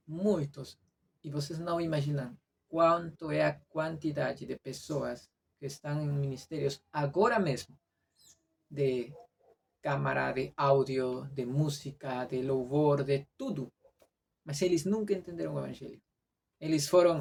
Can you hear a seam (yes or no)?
no